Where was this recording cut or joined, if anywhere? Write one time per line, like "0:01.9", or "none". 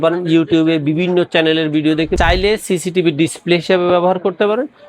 0:02.1